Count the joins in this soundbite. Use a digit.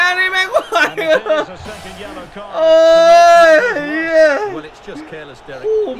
0